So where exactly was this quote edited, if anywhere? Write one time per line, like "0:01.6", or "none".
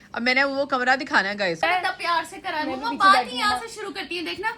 0:01.6